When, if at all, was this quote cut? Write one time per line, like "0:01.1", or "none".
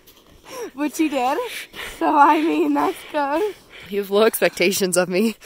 0:03.9

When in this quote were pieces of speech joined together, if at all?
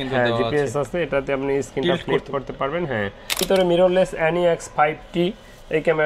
0:03.4

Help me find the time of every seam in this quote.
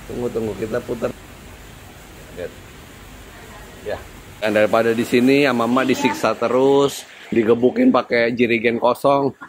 0:04.4

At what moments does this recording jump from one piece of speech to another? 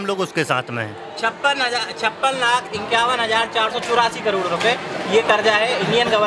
none

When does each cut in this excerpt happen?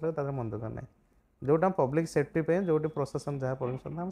none

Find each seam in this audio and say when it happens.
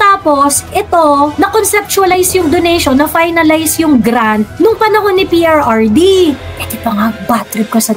0:06.4

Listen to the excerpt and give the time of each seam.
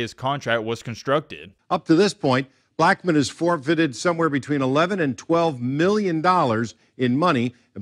0:01.4

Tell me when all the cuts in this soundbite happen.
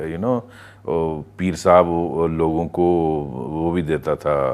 none

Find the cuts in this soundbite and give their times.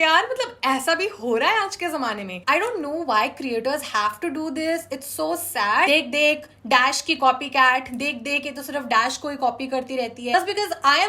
0:02.3
0:05.9
0:10.3

